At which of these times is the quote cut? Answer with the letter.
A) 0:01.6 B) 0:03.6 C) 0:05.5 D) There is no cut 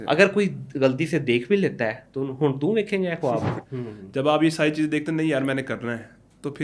B